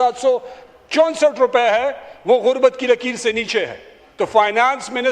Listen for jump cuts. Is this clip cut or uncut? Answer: cut